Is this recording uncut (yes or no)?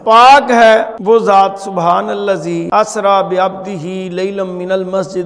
no